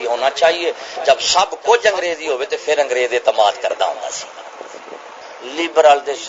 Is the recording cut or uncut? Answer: cut